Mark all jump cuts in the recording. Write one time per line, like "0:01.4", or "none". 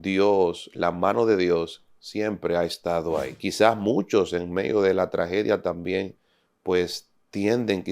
0:03.3